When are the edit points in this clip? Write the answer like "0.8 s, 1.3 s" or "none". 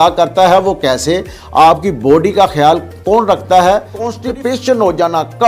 4.2 s